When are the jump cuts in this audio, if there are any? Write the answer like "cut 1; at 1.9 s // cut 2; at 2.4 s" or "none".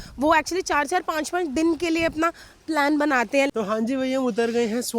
cut 1; at 3.5 s